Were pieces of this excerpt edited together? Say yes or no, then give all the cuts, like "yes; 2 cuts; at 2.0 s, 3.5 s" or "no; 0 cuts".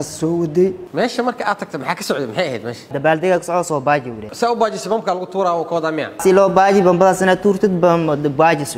yes; 3 cuts; at 0.8 s, 2.9 s, 6.2 s